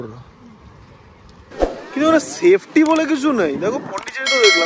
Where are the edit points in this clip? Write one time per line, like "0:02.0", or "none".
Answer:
0:01.5